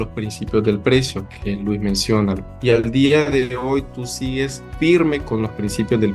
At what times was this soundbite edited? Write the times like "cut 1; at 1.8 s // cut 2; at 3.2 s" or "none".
cut 1; at 2.5 s // cut 2; at 4.6 s